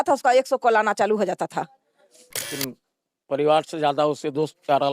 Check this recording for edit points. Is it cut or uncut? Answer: cut